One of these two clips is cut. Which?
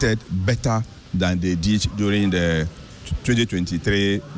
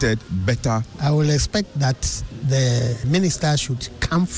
second; 2 cuts; at 0.9 s, 3.1 s

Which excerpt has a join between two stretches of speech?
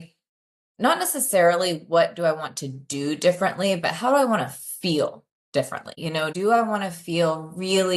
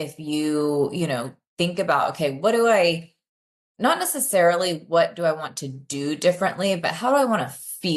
first; 1 cut; at 6.0 s

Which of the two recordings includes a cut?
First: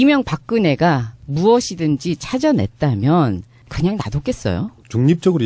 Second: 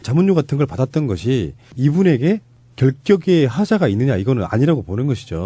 first; 1 cut; at 2.6 s

